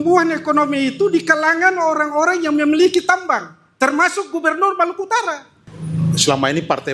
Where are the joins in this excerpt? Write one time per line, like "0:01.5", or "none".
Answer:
0:05.7